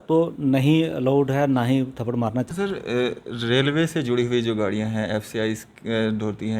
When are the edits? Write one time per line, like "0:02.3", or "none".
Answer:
0:02.5